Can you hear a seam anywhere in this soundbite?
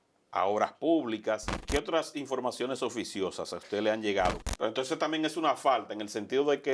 yes; 2 cuts; at 1.6 s, 4.4 s

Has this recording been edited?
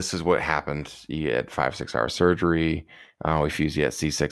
no; 0 cuts

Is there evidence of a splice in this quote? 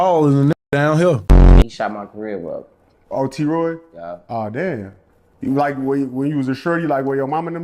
yes; 1 cut; at 1.6 s

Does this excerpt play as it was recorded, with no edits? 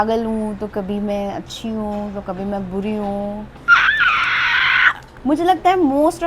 no; 2 cuts; at 3.6 s, 5.0 s

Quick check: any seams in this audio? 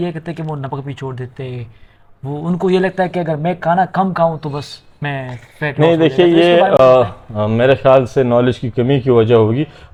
no; 0 cuts

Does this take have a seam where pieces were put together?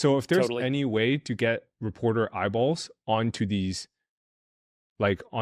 no; 0 cuts

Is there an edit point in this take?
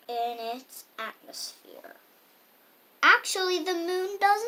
no; 0 cuts

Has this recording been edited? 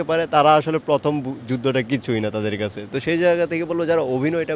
no; 0 cuts

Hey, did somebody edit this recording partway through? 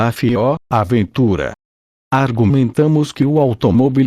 yes; 1 cut; at 2.0 s

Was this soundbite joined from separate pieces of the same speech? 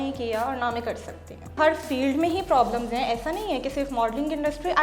yes; 1 cut; at 1.6 s

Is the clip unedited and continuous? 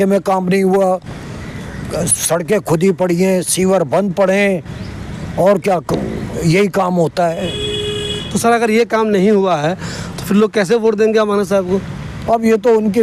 yes; 0 cuts

